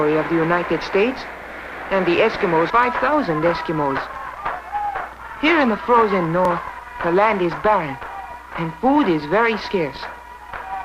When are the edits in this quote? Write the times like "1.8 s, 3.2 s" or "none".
none